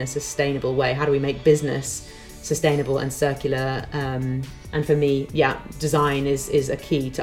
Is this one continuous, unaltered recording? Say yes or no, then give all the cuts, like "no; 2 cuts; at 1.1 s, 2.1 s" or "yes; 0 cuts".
no; 1 cut; at 4.6 s